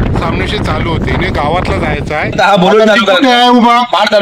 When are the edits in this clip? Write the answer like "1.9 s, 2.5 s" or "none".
2.4 s